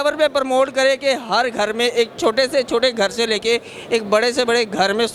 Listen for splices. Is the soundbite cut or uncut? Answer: uncut